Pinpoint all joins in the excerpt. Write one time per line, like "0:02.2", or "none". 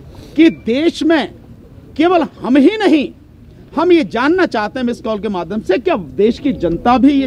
none